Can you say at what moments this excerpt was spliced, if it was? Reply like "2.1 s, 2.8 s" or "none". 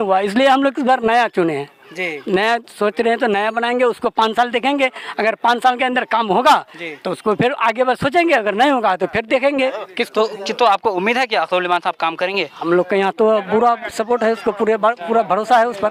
none